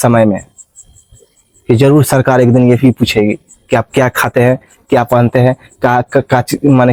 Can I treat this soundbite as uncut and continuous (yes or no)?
yes